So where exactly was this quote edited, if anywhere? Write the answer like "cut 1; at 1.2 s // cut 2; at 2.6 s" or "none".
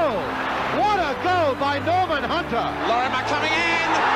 cut 1; at 2.8 s